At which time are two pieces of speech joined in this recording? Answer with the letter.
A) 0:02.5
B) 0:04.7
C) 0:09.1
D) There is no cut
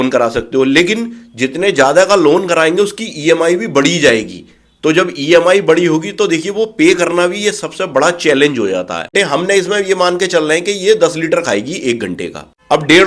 C